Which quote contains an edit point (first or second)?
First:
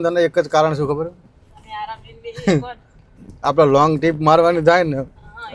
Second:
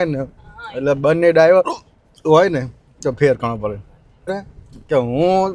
second